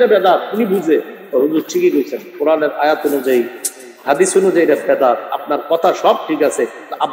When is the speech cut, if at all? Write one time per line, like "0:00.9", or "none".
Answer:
none